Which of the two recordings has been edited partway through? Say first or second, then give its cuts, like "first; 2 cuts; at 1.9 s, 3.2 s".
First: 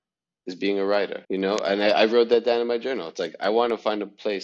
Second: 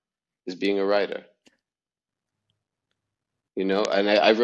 first; 1 cut; at 1.2 s